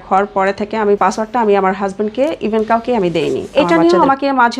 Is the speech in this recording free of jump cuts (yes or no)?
no